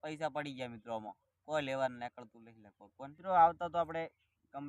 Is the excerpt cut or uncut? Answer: cut